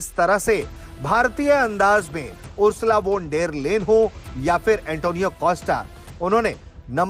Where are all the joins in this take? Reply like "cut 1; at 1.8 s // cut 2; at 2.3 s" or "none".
none